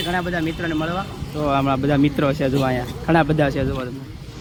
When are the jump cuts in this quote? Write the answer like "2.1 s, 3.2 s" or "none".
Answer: none